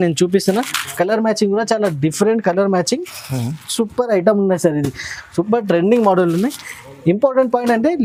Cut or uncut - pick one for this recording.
uncut